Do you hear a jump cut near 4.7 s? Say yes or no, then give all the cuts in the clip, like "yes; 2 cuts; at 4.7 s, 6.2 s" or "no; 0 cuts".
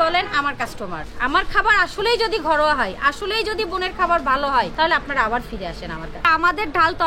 yes; 3 cuts; at 1.1 s, 4.7 s, 6.3 s